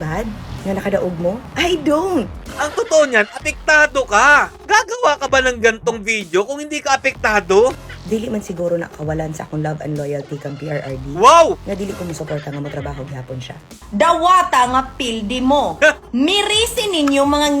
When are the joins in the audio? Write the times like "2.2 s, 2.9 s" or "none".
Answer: 2.4 s, 7.9 s, 13.8 s